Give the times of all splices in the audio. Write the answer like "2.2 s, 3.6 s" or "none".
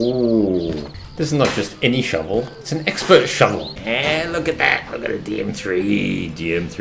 1.1 s, 3.7 s